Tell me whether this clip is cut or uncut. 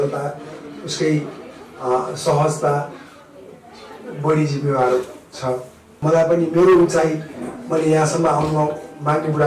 cut